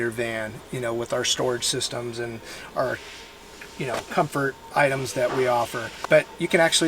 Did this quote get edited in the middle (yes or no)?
yes